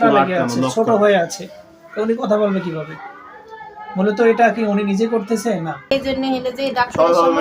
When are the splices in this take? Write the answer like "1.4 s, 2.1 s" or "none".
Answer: 5.9 s